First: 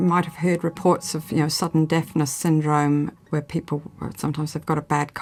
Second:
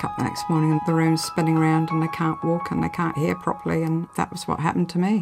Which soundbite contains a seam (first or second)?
second